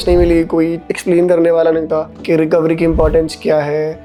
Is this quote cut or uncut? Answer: uncut